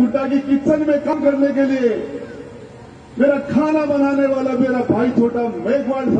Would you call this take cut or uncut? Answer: cut